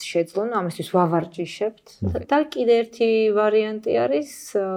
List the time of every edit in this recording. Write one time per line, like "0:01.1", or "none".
0:02.2